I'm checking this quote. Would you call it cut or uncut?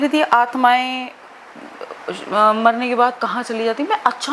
uncut